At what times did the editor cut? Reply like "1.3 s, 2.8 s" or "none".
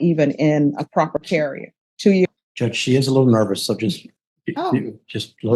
2.3 s